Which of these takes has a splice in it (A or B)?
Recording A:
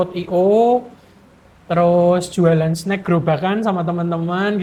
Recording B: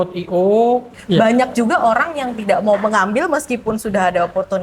B